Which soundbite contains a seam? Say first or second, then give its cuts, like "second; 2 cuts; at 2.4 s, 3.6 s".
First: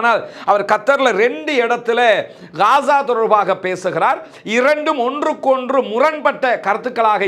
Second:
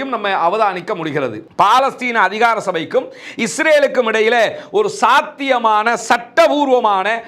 second; 1 cut; at 1.4 s